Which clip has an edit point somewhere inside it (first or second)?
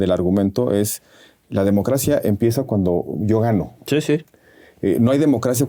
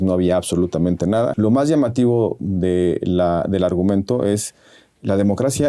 second